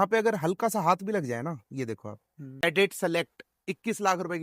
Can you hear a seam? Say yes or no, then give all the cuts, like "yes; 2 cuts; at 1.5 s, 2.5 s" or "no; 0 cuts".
yes; 1 cut; at 2.6 s